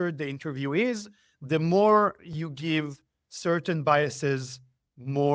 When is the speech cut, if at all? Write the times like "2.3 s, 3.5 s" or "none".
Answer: none